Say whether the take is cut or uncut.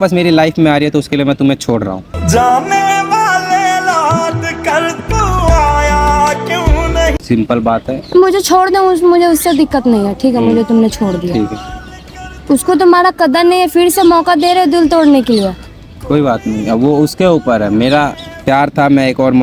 uncut